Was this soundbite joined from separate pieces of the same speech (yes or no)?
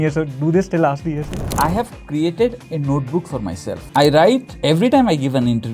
yes